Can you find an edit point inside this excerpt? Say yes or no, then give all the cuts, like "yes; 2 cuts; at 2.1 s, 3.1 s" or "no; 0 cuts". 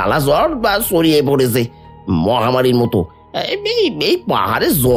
no; 0 cuts